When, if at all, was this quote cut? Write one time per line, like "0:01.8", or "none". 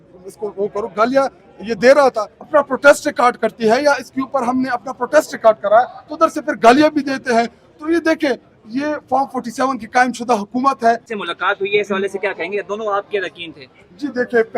0:02.5
0:11.1